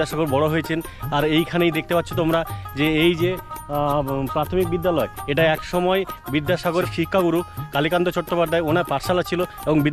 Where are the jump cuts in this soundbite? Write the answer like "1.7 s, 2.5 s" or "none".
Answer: none